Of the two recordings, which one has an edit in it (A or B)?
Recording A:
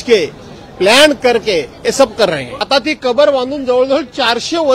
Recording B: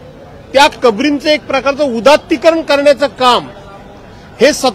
A